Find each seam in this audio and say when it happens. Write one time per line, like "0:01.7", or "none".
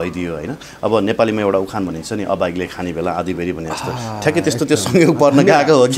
none

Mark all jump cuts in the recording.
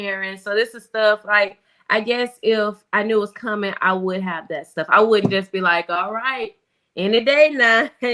none

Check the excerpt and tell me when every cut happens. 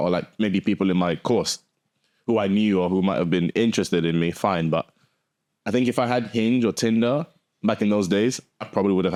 none

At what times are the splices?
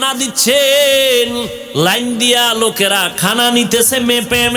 0:01.6

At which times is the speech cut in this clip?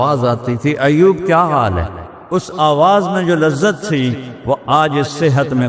none

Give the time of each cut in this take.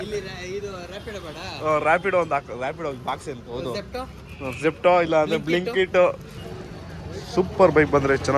0:06.3

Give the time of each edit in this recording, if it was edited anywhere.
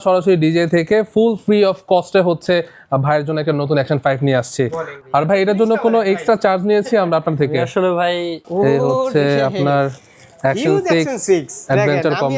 0:04.9
0:08.4

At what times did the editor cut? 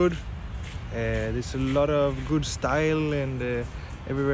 none

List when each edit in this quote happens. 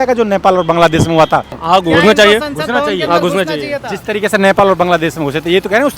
0:01.5

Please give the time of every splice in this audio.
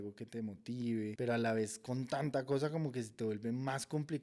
0:01.1

